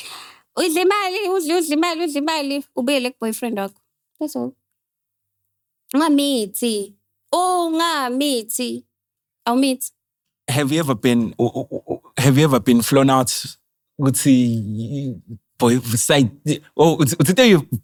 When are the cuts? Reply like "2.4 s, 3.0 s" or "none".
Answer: none